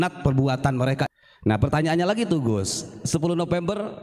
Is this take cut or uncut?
cut